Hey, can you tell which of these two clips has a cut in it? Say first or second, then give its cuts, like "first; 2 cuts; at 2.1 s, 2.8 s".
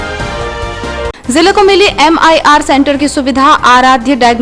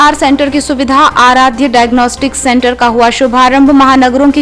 first; 1 cut; at 1.1 s